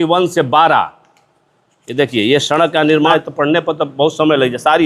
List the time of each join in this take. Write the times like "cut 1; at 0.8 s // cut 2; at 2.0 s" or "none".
cut 1; at 3.1 s